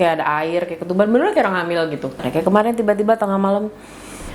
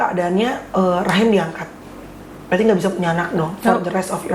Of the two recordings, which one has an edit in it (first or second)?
first